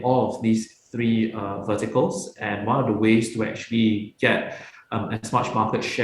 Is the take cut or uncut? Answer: uncut